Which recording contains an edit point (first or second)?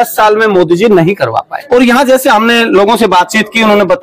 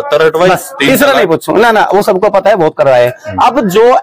first